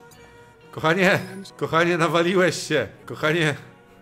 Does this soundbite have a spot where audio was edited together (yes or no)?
yes